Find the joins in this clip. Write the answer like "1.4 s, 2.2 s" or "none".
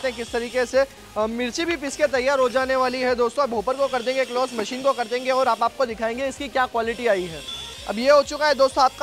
none